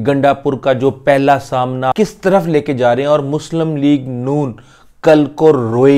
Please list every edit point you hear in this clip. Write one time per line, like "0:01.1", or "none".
0:01.9